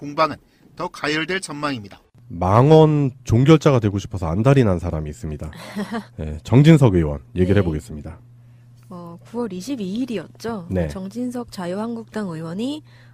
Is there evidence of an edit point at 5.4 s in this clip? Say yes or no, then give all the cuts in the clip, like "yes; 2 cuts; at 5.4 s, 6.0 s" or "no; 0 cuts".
yes; 1 cut; at 5.4 s